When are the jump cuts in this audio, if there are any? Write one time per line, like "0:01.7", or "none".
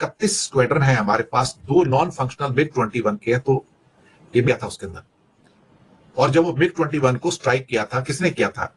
0:04.5